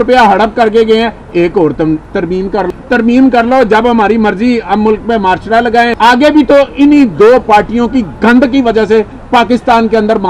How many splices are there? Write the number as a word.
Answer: two